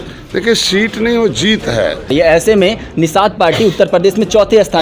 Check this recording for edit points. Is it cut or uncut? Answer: cut